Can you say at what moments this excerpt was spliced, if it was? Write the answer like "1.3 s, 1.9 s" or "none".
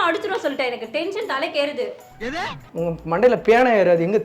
none